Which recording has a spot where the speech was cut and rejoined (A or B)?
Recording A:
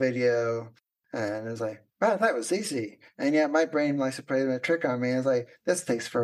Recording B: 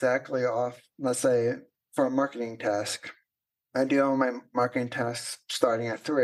B